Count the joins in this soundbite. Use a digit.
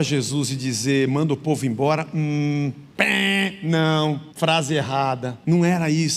3